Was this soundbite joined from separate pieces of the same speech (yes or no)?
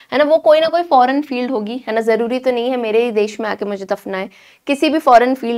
no